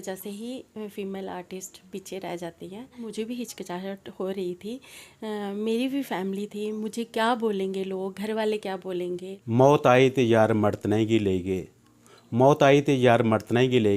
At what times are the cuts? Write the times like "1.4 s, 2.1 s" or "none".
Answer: 3.1 s, 9.3 s